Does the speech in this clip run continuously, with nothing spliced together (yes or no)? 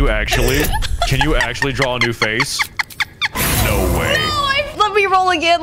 no